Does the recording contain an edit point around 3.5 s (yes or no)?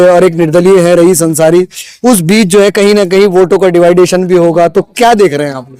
no